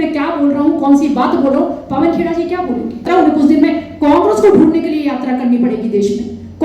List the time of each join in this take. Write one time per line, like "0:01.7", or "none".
0:03.1